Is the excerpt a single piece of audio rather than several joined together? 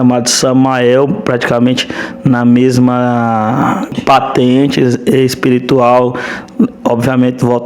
no; 1 cut; at 4.0 s

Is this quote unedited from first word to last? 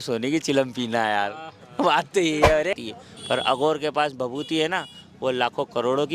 no; 1 cut; at 2.8 s

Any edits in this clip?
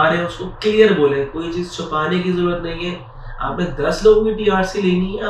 no; 0 cuts

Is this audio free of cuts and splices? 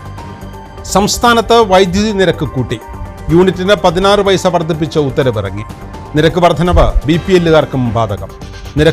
yes; 0 cuts

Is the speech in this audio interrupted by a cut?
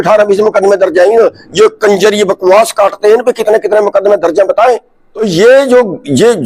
yes; 1 cut; at 5.2 s

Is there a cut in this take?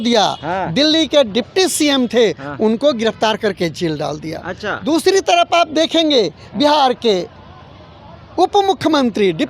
no; 0 cuts

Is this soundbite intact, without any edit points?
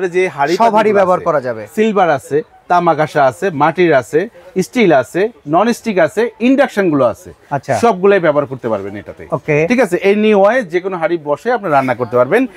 yes; 0 cuts

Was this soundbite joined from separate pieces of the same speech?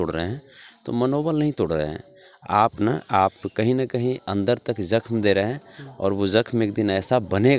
no; 0 cuts

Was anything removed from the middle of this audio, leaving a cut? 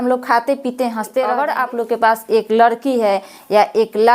yes; 1 cut; at 1.4 s

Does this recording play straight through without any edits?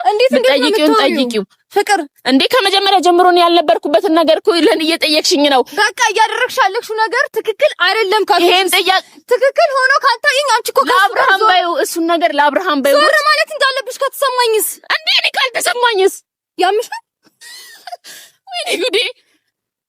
yes; 0 cuts

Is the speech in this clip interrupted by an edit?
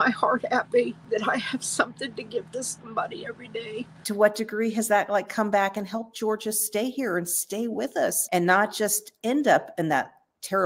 yes; 3 cuts; at 1.0 s, 4.0 s, 8.2 s

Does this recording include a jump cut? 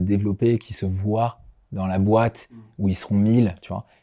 no; 0 cuts

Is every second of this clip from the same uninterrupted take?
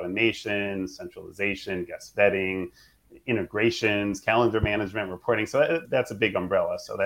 no; 1 cut; at 5.8 s

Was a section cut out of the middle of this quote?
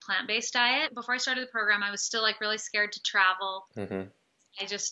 yes; 1 cut; at 1.0 s

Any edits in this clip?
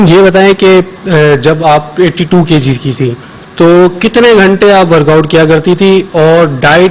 no; 0 cuts

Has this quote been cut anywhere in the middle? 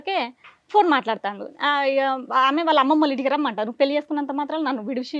no; 0 cuts

